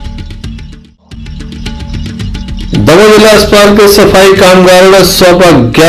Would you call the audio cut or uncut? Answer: cut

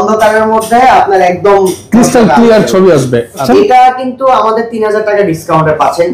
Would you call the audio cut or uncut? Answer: cut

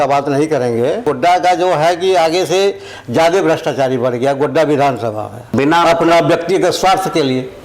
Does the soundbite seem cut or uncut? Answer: cut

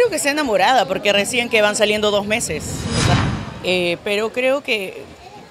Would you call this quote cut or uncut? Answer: cut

